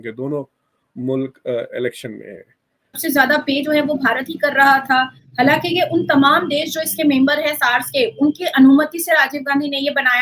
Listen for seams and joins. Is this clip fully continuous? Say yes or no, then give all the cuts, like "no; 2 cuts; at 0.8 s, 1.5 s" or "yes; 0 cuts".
no; 1 cut; at 3.0 s